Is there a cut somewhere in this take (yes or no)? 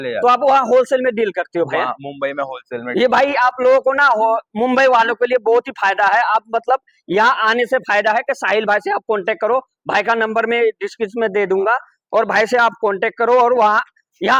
no